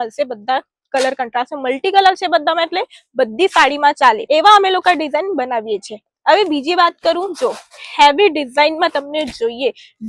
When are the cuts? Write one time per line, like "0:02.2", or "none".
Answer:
none